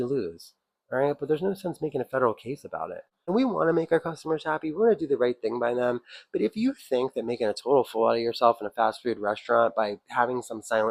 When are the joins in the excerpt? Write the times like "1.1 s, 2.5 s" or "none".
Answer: 3.3 s